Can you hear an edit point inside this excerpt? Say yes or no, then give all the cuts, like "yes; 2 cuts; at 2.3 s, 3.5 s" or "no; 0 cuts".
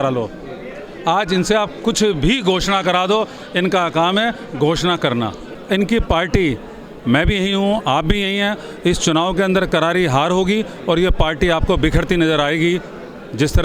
yes; 1 cut; at 5.5 s